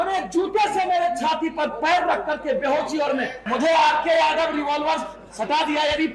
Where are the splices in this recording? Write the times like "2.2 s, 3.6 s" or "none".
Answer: 3.4 s

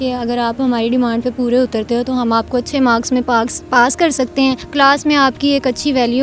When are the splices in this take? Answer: 4.6 s

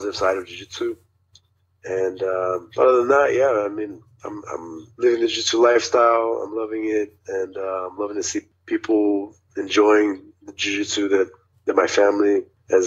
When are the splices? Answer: none

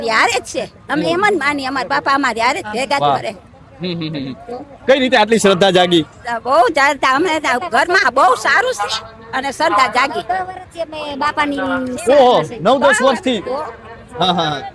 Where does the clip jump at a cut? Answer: none

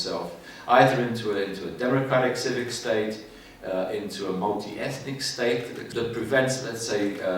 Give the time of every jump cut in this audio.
5.9 s

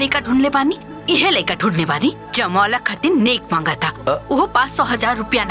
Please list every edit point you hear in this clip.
none

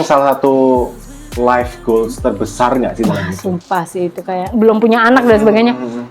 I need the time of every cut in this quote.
4.4 s

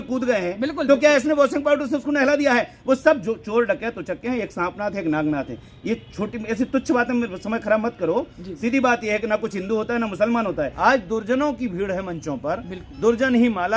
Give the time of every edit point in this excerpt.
10.7 s

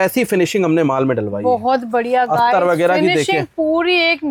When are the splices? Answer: none

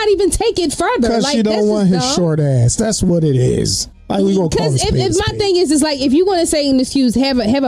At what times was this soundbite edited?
none

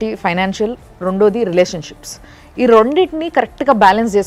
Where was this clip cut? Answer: none

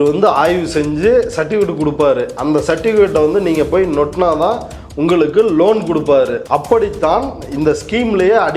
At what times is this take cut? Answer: 6.4 s

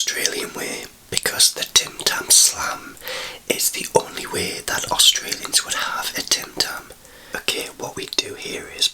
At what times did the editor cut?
7.3 s

